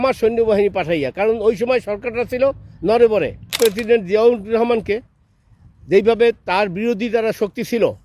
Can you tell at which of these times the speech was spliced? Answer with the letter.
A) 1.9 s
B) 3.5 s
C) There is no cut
B